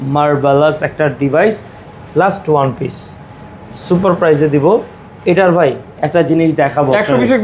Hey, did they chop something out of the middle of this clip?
no; 0 cuts

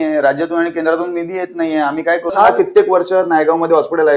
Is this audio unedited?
no; 1 cut; at 2.3 s

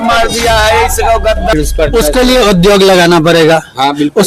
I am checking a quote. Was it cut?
yes; 1 cut; at 1.5 s

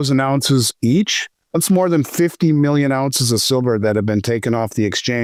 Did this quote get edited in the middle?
no; 0 cuts

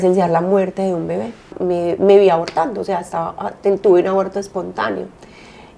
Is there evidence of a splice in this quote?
yes; 1 cut; at 1.5 s

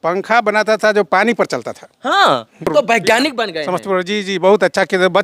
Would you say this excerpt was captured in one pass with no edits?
no; 1 cut; at 2.7 s

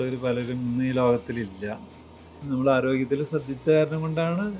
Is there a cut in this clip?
yes; 1 cut; at 2.4 s

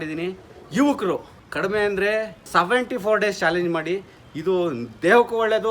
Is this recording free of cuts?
no; 2 cuts; at 1.4 s, 2.4 s

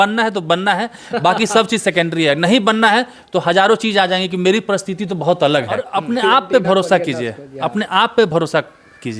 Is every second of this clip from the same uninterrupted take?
no; 1 cut; at 5.8 s

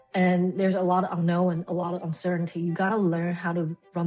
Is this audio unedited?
yes; 0 cuts

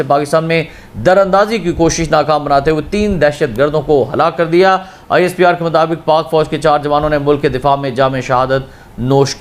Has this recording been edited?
no; 0 cuts

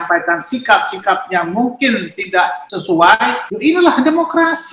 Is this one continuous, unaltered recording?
no; 2 cuts; at 2.7 s, 3.5 s

